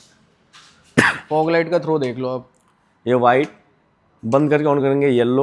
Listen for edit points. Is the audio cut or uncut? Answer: uncut